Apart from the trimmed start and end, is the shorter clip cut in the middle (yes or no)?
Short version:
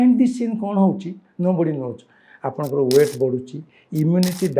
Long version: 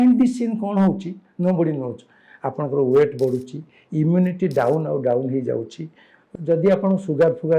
no